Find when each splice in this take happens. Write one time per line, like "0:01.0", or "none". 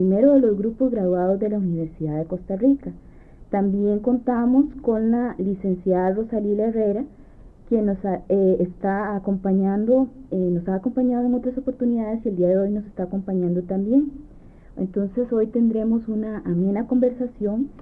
none

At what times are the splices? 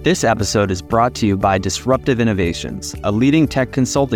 none

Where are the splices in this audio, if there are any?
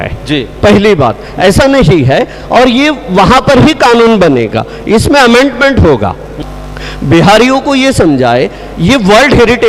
0:06.3

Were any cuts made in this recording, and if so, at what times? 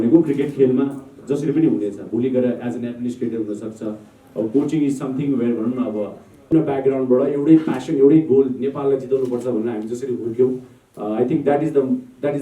0:06.5

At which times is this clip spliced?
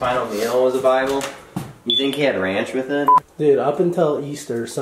0:03.2

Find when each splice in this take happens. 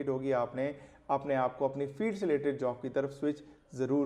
none

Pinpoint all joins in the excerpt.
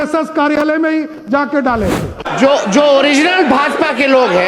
0:02.2

